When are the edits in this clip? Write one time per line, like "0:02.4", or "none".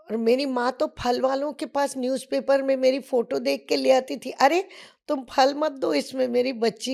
none